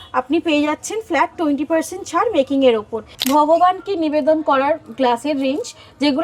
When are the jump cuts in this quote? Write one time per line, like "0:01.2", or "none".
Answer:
0:03.1